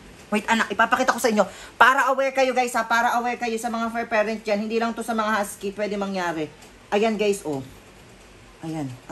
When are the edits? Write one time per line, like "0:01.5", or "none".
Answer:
none

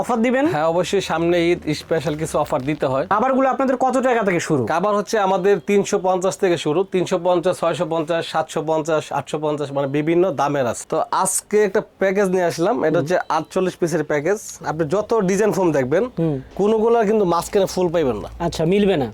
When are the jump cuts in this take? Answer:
0:03.1
0:10.8
0:14.6

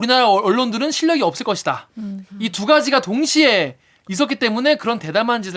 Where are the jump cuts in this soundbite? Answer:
none

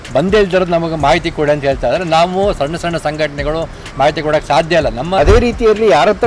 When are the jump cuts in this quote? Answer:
0:05.2

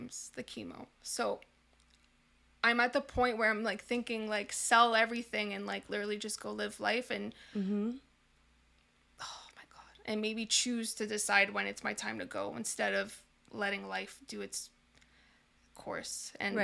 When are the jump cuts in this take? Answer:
none

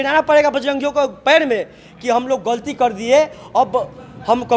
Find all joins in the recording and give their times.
none

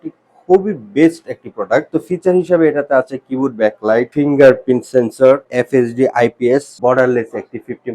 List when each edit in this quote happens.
0:01.9
0:04.1
0:05.5
0:06.7

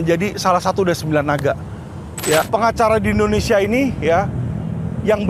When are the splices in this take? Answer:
0:02.5

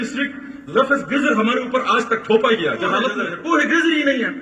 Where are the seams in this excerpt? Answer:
0:03.2

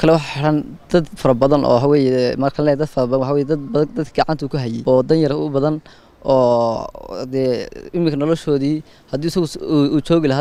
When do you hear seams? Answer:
0:04.8

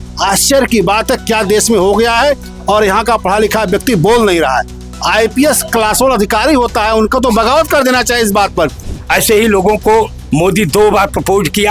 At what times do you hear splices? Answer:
0:08.8

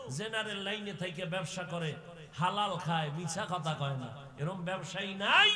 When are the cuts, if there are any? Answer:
none

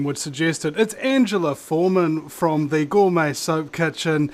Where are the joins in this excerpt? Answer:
0:01.3

